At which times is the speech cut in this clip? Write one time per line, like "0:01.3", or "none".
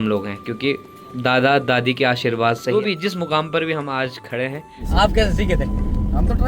0:02.9
0:04.9